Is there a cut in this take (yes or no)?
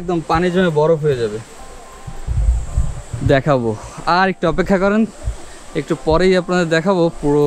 yes